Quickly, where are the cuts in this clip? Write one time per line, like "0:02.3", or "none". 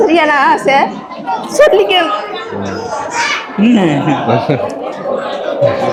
none